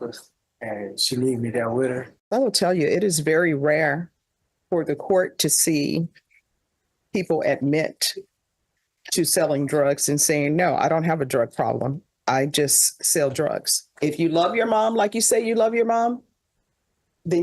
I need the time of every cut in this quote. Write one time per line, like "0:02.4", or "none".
0:02.1
0:13.9